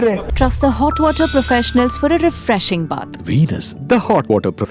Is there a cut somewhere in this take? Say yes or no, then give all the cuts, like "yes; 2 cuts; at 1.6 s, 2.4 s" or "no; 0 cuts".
no; 0 cuts